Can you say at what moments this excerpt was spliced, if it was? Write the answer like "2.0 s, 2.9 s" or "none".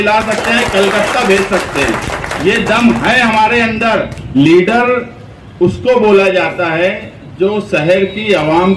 4.2 s